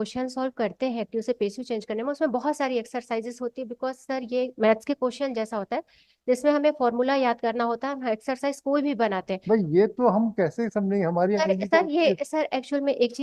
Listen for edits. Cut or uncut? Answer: uncut